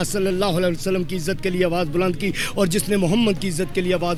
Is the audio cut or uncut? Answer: uncut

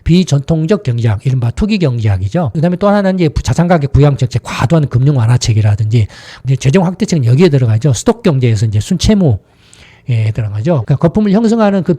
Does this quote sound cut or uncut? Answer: cut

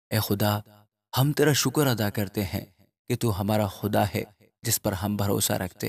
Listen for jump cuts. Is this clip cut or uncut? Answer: uncut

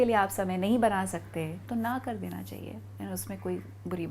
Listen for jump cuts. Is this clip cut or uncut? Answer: uncut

